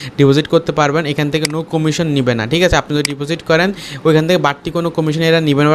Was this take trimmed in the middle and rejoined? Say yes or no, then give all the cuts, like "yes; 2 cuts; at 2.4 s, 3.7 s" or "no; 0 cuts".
no; 0 cuts